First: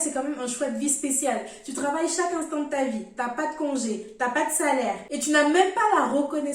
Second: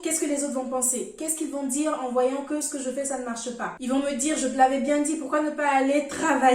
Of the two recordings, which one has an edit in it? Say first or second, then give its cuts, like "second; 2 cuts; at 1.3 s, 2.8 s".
second; 1 cut; at 3.7 s